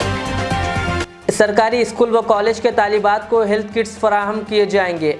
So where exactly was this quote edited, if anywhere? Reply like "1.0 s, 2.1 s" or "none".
1.1 s